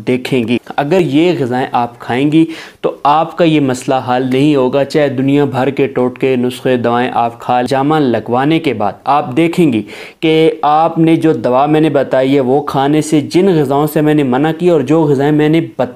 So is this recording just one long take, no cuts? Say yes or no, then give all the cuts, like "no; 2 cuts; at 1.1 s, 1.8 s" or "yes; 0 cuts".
no; 2 cuts; at 1.0 s, 7.7 s